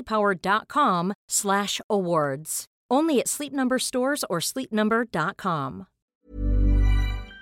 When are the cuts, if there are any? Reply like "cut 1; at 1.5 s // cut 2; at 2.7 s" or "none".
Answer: cut 1; at 6.1 s